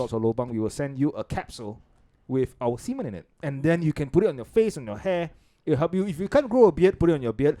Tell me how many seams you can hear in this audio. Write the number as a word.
zero